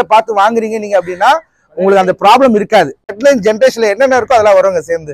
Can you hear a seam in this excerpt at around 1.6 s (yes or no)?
no